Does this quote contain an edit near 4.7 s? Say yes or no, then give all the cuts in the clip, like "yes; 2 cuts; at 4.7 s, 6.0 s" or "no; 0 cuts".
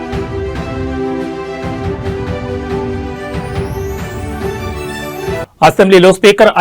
yes; 1 cut; at 4.7 s